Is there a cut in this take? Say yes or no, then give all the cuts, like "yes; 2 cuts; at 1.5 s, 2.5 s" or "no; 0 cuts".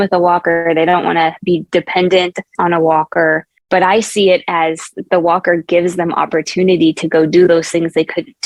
no; 0 cuts